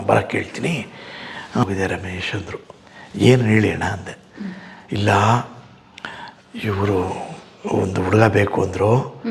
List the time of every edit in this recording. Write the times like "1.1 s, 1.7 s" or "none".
1.6 s